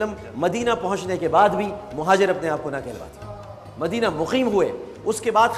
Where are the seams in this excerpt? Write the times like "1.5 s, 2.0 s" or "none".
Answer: 1.0 s